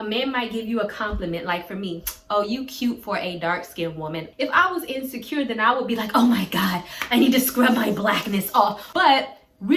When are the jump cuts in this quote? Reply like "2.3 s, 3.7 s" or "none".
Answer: 4.3 s, 8.8 s